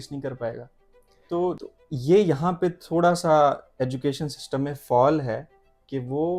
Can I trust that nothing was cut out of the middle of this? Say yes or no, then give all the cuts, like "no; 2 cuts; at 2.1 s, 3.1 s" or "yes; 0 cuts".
no; 1 cut; at 1.6 s